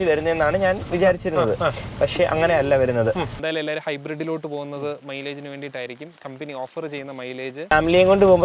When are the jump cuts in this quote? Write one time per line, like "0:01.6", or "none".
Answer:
0:03.3
0:07.7